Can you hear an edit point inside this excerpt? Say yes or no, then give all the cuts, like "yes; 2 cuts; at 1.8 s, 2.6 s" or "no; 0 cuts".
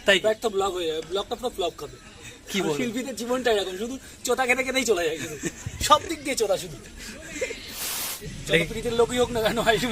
yes; 1 cut; at 8.1 s